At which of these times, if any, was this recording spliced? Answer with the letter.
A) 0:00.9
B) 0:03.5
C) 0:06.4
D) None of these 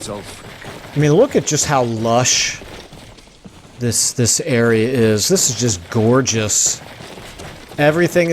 A